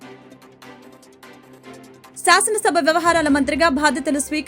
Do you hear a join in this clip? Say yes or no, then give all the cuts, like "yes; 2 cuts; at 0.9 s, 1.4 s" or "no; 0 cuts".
yes; 1 cut; at 2.2 s